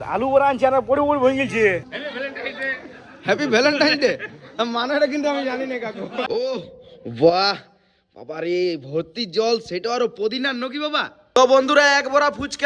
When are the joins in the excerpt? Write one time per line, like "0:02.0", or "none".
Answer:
0:02.0
0:06.3
0:11.2

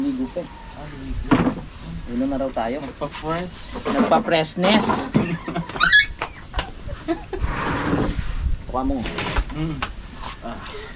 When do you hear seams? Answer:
none

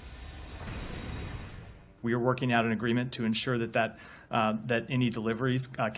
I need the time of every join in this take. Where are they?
0:01.9

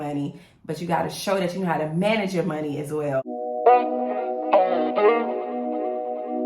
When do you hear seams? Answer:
0:03.3

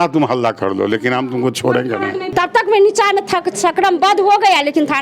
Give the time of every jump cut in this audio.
0:02.2

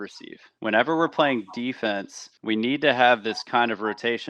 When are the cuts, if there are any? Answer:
none

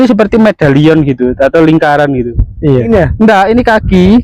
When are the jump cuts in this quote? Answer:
0:02.9

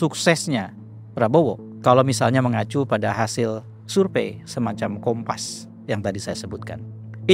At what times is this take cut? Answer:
none

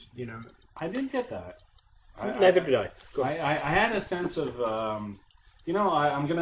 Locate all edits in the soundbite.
0:02.6

